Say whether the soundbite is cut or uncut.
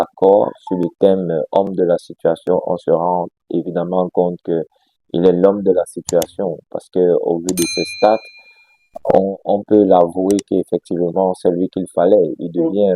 uncut